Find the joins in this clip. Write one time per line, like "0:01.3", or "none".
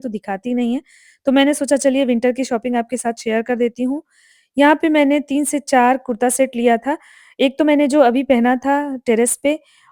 none